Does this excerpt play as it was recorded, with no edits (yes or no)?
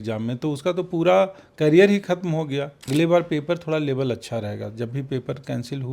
no